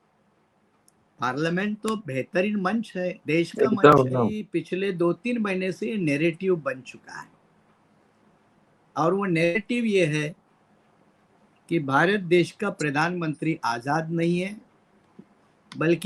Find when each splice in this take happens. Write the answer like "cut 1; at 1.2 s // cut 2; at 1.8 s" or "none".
cut 1; at 4.4 s